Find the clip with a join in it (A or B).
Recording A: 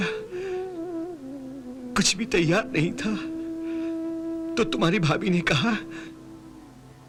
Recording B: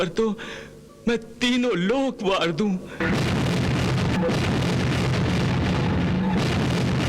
B